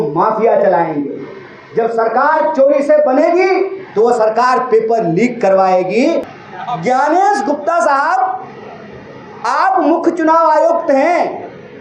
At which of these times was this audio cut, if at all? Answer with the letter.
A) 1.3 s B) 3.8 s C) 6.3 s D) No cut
C